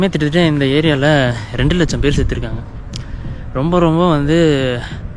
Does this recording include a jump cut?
no; 0 cuts

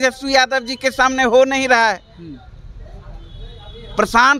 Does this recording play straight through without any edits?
yes; 0 cuts

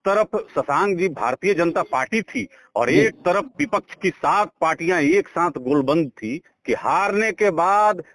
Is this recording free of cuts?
no; 1 cut; at 6.5 s

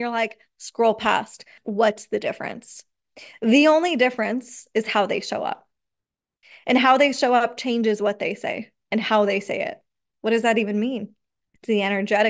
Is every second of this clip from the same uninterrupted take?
no; 2 cuts; at 1.6 s, 10.1 s

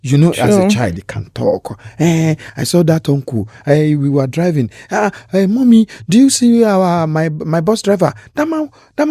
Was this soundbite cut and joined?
no; 0 cuts

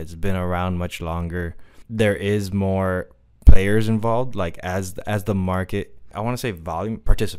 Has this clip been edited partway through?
yes; 2 cuts; at 1.7 s, 6.1 s

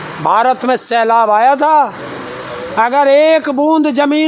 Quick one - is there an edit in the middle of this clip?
no; 0 cuts

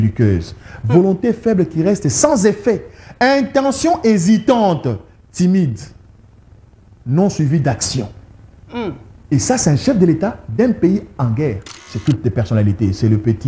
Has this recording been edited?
yes; 1 cut; at 11.9 s

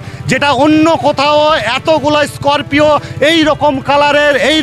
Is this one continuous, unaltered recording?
yes; 0 cuts

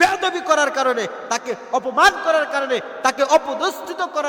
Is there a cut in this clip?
no; 0 cuts

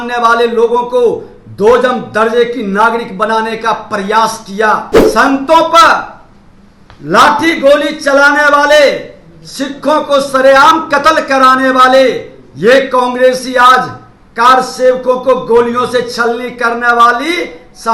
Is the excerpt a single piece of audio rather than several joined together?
no; 1 cut; at 5.0 s

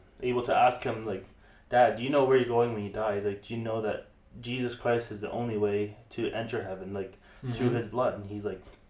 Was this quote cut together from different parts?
no; 0 cuts

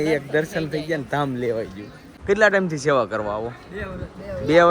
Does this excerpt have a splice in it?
yes; 1 cut; at 2.1 s

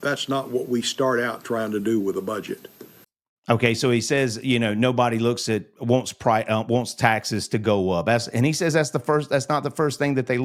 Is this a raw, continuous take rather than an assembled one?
yes; 0 cuts

